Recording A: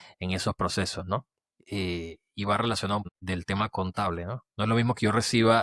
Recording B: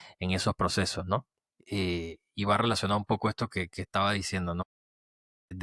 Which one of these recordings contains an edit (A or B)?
A